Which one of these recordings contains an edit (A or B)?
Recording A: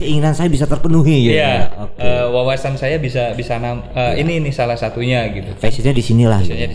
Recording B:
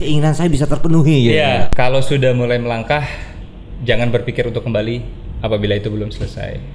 B